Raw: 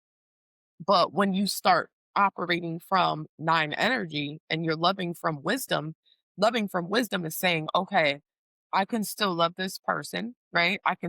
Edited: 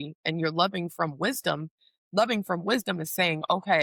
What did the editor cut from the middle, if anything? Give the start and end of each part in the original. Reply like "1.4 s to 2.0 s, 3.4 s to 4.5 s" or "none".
none